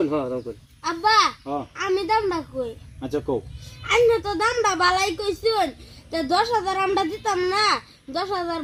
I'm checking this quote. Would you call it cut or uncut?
uncut